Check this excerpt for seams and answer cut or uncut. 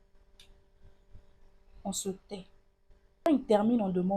cut